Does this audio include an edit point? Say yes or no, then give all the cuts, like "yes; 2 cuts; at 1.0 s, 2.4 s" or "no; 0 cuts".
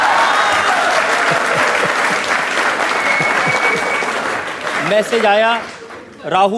yes; 1 cut; at 4.5 s